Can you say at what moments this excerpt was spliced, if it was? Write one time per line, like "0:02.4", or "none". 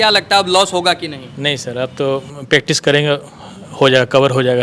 none